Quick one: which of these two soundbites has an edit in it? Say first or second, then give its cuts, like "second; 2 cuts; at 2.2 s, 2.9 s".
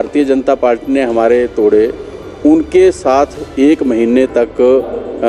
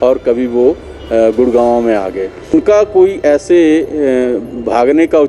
second; 1 cut; at 2.5 s